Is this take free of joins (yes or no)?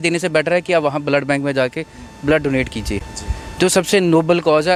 yes